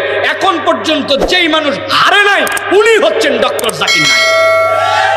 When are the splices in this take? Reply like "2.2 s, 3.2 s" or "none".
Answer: none

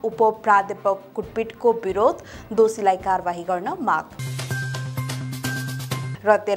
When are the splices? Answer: none

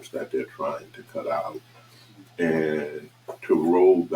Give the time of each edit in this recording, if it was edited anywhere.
none

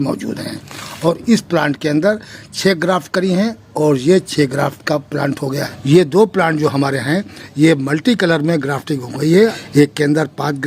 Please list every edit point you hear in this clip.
5.7 s, 9.5 s

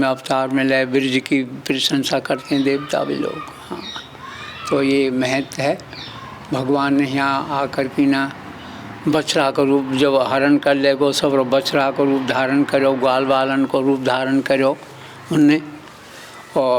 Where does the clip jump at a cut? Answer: none

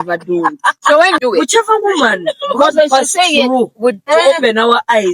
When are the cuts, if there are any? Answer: 1.2 s

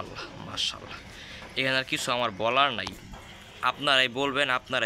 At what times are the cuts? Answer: none

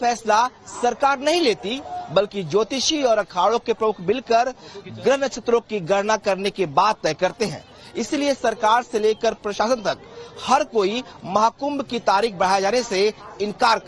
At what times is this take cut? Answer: 12.9 s

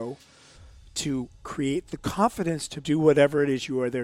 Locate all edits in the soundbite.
2.7 s

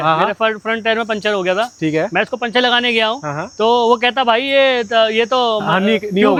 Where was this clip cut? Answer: none

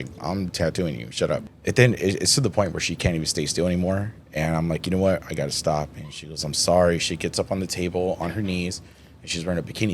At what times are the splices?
1.4 s

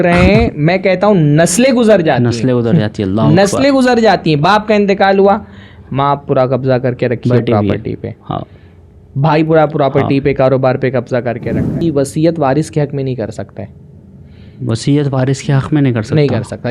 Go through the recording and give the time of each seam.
11.8 s

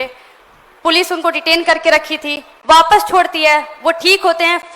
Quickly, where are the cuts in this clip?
none

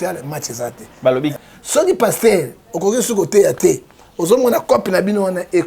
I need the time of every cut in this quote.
1.3 s

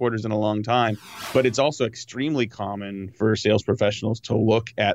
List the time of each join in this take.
1.1 s, 3.2 s

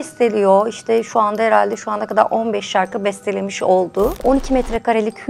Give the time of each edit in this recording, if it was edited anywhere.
4.2 s

